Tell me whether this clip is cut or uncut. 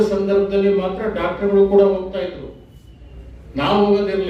uncut